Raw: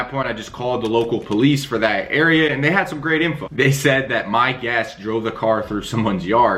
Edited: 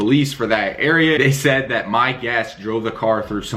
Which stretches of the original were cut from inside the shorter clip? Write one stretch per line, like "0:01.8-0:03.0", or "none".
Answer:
0:02.5-0:03.6

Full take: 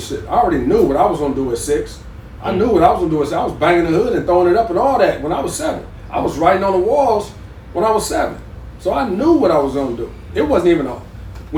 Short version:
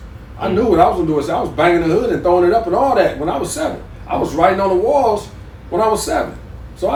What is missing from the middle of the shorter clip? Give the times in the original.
none

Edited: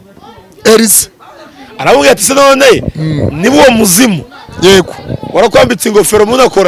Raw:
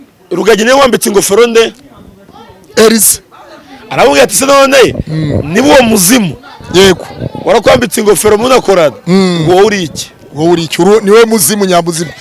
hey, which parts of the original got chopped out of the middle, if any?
none

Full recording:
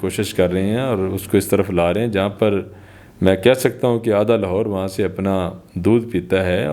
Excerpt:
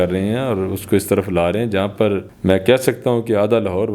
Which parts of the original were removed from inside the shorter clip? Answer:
0:02.7-0:03.1

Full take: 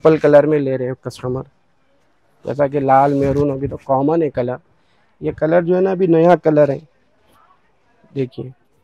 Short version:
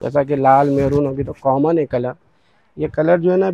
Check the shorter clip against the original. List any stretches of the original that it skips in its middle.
none

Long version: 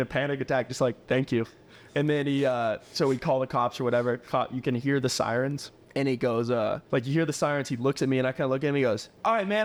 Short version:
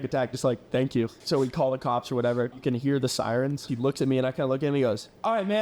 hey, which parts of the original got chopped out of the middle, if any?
0:01.5-0:02.9
0:04.2-0:04.6
0:05.7-0:07.7

